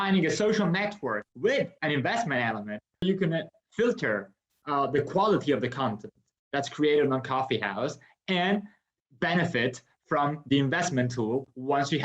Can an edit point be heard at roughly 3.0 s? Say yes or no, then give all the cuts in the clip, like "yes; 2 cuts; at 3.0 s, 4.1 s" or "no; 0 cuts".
yes; 2 cuts; at 1.2 s, 3.0 s